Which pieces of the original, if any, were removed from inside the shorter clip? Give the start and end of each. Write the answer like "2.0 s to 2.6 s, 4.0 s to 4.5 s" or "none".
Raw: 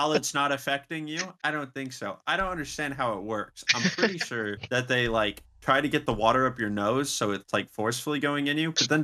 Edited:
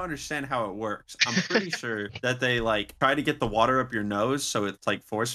5.4 s to 5.6 s